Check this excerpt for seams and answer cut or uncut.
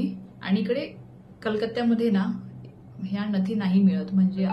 uncut